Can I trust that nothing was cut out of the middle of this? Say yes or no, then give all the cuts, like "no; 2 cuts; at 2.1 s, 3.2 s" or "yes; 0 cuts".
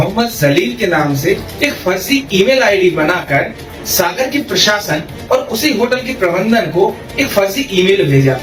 yes; 0 cuts